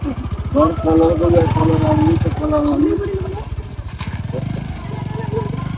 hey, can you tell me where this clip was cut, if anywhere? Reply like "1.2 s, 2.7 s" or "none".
none

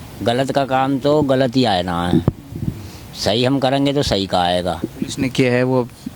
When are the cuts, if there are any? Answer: 4.9 s

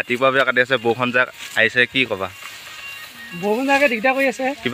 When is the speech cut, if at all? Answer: none

